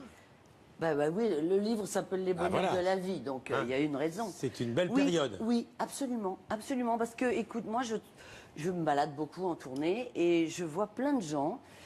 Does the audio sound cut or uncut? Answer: uncut